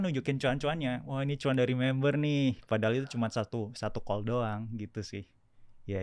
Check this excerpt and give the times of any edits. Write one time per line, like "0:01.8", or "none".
none